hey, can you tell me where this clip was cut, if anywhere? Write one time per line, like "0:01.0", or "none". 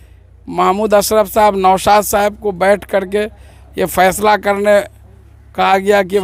none